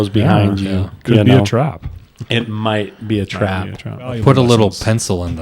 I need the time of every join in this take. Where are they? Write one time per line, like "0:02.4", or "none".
0:04.2